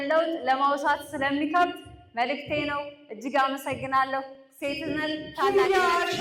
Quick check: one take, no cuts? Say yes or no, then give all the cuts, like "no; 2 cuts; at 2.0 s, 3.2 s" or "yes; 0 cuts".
yes; 0 cuts